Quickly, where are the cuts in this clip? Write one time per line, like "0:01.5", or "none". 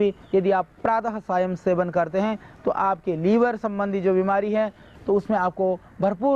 0:04.9